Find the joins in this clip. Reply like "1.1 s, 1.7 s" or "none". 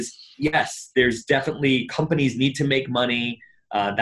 none